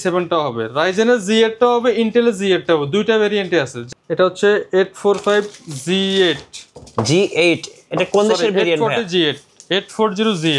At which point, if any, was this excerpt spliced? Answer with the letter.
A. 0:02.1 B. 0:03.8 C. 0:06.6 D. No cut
B